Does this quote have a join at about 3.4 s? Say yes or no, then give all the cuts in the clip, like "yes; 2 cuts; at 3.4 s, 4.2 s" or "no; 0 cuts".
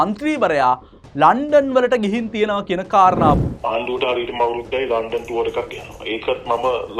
yes; 1 cut; at 3.4 s